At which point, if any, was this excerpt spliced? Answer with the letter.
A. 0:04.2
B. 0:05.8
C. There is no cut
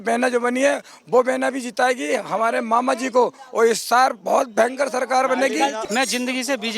B